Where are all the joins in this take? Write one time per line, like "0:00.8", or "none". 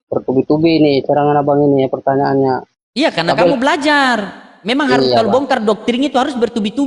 0:02.8